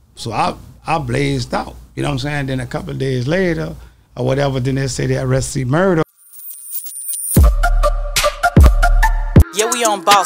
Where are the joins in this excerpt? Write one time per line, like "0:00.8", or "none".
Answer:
0:06.0